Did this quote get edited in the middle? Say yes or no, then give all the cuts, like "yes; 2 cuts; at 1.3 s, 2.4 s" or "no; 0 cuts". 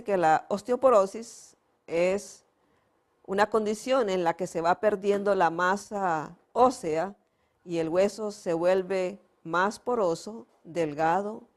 yes; 1 cut; at 5.9 s